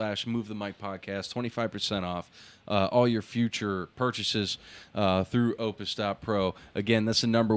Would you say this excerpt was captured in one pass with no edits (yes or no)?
yes